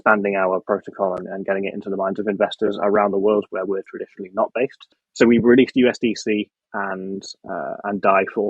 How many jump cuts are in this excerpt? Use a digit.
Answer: 1